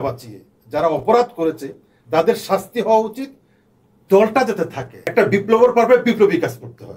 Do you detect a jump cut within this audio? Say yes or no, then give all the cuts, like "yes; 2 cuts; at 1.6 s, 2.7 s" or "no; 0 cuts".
yes; 1 cut; at 5.0 s